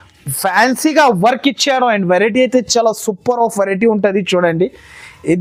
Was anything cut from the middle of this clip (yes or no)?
no